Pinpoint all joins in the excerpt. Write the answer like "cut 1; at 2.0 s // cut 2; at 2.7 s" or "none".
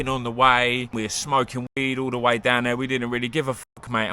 cut 1; at 0.9 s